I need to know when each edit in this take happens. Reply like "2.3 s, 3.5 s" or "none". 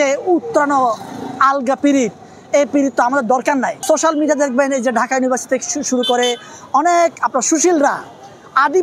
3.8 s